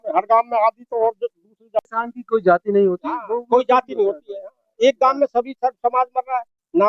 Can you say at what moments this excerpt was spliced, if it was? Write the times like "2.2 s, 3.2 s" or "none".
1.8 s